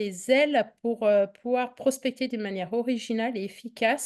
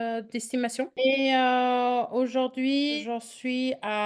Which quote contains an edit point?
second; 2 cuts; at 1.0 s, 3.0 s

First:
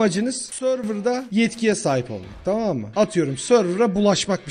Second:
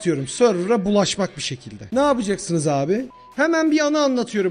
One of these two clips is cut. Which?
second; 1 cut; at 3.1 s

